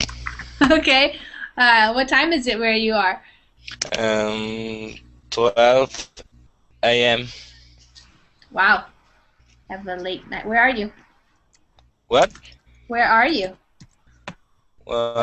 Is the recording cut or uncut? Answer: cut